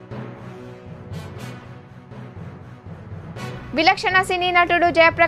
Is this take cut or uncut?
uncut